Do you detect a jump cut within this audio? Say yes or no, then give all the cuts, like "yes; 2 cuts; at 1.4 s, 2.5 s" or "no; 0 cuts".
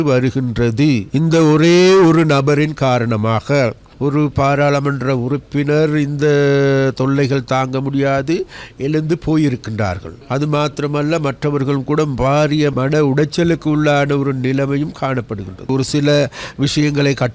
yes; 5 cuts; at 1.1 s, 3.9 s, 10.1 s, 12.7 s, 15.7 s